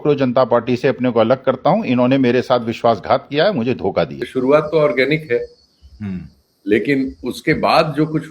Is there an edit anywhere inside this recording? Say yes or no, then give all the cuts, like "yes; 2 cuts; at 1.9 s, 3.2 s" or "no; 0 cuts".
yes; 1 cut; at 4.2 s